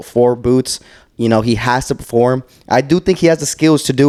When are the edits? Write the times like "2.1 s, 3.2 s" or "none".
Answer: none